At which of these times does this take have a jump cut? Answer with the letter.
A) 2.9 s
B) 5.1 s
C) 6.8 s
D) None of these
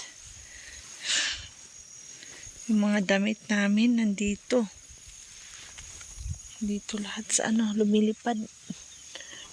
D